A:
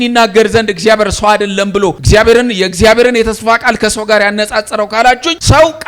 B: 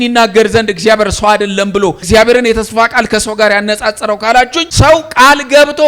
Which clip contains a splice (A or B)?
B